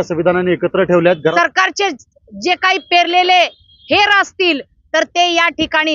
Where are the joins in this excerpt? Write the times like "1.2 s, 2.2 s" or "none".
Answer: 1.2 s

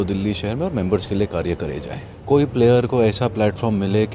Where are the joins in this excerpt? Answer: 2.1 s

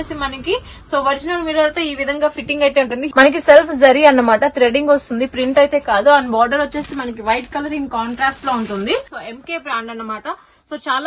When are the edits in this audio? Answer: 3.0 s, 9.2 s

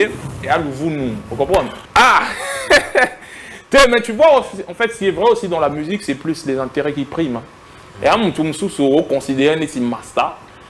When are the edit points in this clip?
1.8 s

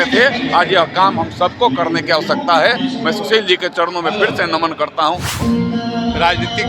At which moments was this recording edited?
5.4 s

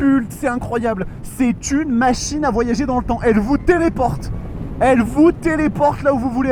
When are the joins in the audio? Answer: none

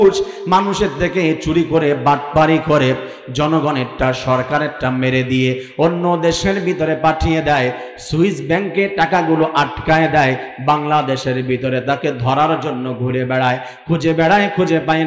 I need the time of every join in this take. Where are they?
none

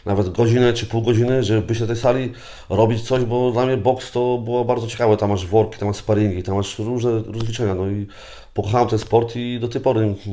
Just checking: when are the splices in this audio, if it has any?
none

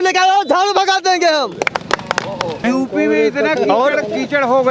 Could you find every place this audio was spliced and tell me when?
2.6 s

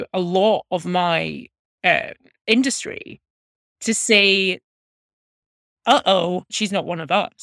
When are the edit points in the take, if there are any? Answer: 6.5 s

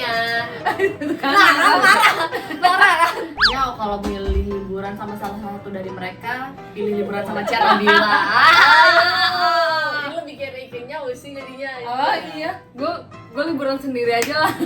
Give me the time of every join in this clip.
3.4 s

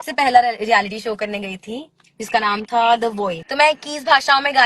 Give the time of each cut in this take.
3.4 s

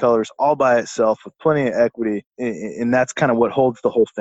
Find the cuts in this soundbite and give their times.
2.3 s

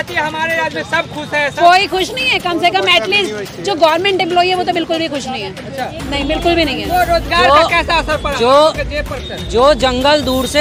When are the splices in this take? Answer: none

